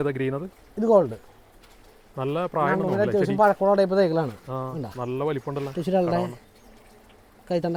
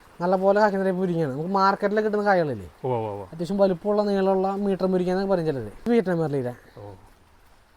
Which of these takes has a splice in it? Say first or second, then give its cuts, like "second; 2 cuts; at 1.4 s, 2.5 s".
second; 1 cut; at 5.8 s